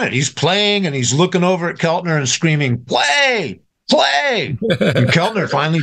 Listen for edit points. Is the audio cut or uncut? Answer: uncut